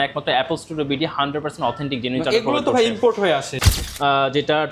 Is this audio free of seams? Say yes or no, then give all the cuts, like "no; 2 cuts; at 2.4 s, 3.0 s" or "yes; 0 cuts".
no; 1 cut; at 3.6 s